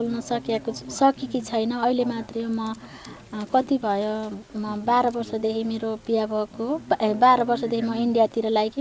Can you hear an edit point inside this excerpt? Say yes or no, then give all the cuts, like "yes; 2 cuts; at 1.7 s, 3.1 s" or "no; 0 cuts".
no; 0 cuts